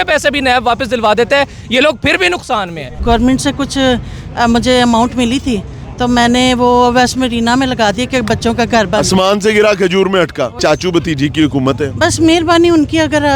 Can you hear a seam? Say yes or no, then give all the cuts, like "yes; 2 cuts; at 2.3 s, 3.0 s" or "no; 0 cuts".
yes; 2 cuts; at 2.9 s, 10.6 s